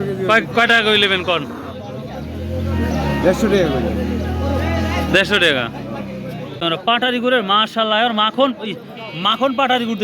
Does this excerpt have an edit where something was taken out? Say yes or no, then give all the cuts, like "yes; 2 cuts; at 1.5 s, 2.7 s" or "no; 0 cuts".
yes; 1 cut; at 6.5 s